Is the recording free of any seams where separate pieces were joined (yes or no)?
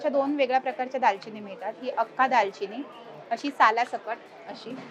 yes